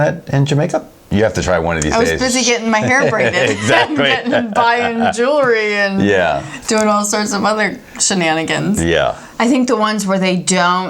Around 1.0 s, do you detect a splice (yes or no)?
yes